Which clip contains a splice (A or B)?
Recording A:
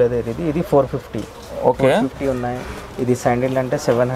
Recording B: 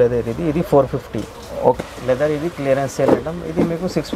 B